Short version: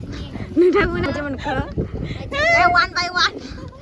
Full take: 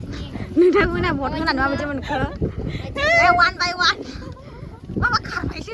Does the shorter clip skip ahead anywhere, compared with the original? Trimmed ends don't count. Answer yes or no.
yes